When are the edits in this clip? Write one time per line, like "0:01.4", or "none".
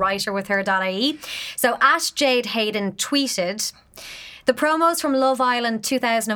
none